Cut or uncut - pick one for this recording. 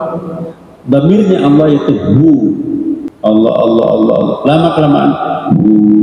cut